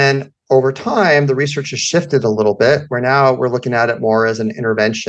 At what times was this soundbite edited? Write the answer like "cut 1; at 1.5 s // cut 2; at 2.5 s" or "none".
none